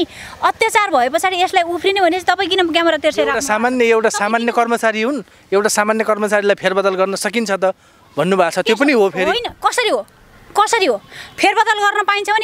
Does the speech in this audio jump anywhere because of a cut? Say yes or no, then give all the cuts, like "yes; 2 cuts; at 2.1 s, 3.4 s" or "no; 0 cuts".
no; 0 cuts